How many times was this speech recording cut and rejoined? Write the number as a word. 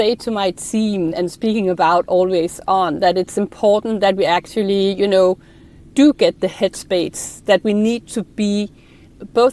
one